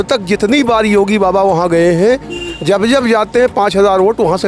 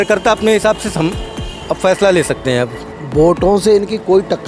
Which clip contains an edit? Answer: second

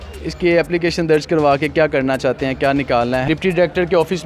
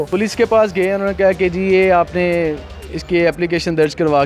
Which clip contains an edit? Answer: first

